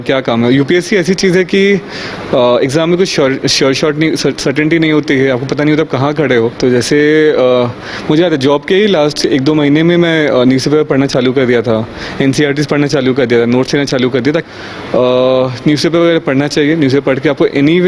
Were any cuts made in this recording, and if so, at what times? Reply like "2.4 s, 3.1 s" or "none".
6.5 s, 14.5 s